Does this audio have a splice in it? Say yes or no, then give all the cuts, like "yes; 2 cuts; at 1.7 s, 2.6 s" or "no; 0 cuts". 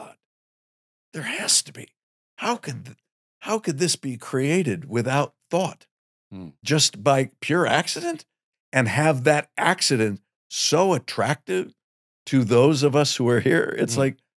no; 0 cuts